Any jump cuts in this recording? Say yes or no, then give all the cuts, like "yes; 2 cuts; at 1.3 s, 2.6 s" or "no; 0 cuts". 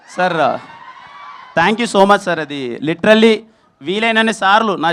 no; 0 cuts